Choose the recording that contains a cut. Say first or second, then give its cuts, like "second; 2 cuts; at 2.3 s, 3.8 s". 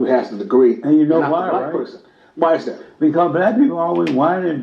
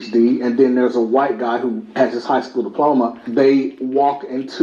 second; 2 cuts; at 1.6 s, 3.7 s